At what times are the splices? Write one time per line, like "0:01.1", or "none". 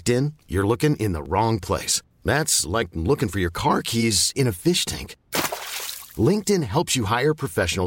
none